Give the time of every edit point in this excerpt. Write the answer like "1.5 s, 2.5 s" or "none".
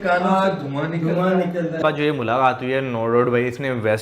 1.8 s